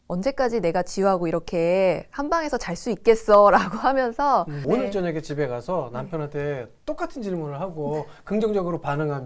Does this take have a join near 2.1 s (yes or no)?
no